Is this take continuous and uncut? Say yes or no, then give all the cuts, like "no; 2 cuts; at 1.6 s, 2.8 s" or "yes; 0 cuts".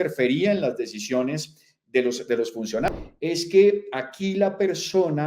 no; 1 cut; at 2.9 s